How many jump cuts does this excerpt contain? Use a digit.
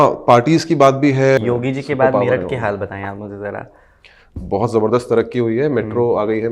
1